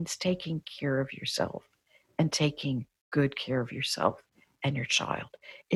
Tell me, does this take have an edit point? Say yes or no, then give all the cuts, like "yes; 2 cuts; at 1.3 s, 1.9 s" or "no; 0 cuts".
no; 0 cuts